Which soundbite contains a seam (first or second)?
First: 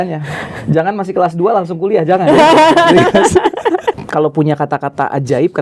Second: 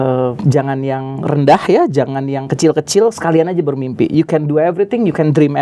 first